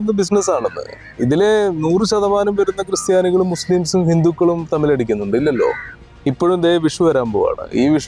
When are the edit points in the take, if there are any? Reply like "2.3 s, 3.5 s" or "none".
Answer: none